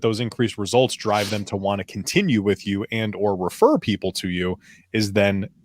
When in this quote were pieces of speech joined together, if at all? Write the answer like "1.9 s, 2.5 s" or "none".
none